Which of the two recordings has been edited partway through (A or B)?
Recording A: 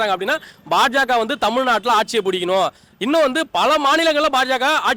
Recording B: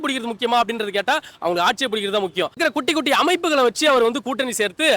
B